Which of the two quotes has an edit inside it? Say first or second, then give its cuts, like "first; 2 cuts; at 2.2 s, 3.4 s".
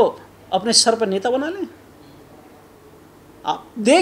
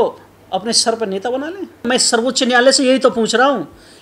second; 1 cut; at 1.9 s